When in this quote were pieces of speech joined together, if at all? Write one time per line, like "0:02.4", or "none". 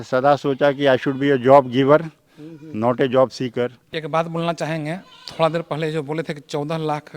0:03.9